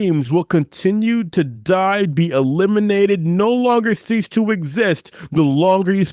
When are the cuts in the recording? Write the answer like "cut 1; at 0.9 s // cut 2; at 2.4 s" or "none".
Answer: none